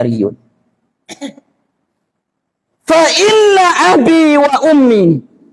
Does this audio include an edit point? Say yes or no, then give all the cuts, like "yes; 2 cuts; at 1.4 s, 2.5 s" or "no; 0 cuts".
no; 0 cuts